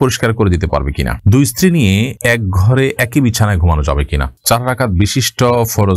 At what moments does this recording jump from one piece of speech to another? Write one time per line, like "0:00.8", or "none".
0:01.2
0:04.4